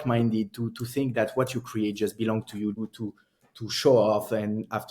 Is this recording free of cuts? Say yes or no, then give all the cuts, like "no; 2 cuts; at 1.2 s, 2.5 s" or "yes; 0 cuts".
no; 1 cut; at 2.8 s